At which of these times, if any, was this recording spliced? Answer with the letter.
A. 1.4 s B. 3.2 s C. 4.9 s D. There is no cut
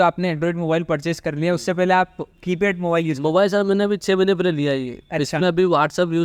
D